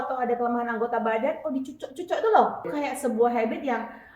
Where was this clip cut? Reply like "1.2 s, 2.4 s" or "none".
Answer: 2.7 s